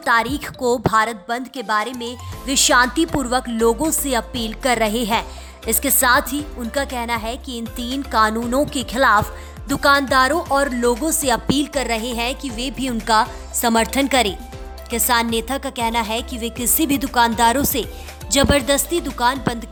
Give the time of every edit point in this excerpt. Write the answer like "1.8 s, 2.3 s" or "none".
none